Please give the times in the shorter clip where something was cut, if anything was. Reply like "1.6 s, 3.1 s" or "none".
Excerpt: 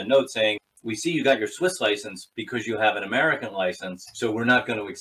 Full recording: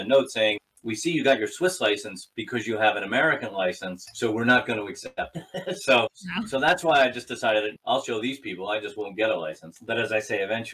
none